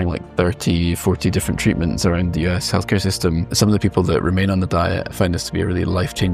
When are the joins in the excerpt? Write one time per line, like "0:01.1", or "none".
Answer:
0:03.4
0:05.1